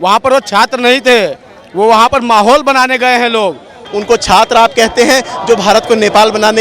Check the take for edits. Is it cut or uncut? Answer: cut